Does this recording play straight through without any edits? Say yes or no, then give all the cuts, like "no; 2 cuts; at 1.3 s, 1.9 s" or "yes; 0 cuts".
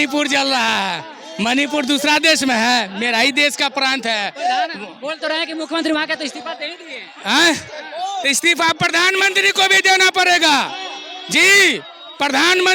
yes; 0 cuts